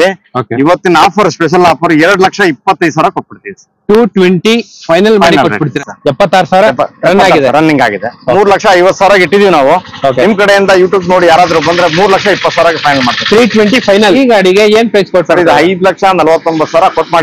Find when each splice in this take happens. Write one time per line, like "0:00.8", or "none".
0:05.7
0:14.2